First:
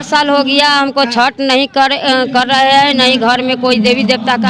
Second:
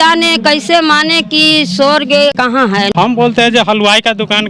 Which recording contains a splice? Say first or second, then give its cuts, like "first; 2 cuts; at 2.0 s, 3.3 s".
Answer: second; 1 cut; at 2.4 s